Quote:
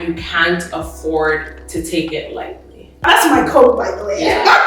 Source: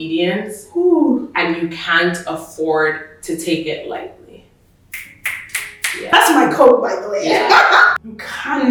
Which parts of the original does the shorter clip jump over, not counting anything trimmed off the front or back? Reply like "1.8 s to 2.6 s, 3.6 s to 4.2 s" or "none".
4.6 s to 6.1 s